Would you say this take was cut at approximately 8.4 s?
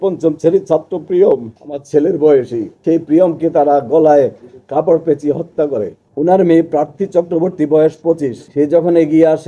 yes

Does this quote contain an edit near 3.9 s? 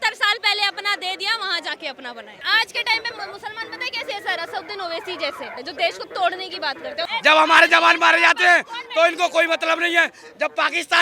no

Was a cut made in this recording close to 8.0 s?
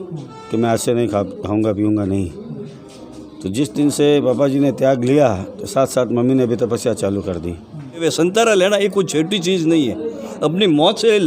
yes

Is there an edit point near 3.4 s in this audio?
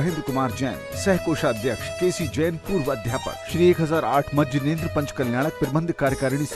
yes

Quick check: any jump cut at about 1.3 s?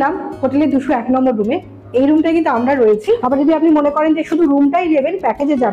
no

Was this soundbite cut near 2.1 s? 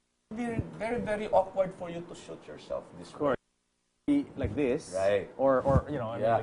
yes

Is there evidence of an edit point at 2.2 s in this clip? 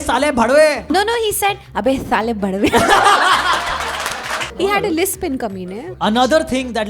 no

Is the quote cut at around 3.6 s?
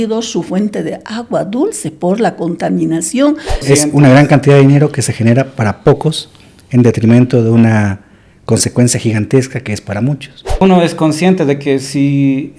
yes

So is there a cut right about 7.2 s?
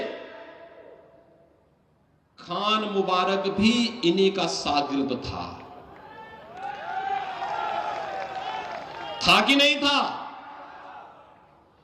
no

